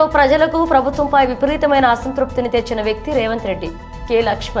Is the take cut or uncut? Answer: uncut